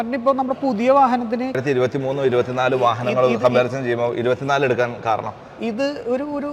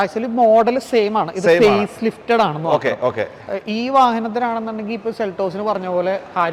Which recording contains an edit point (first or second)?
first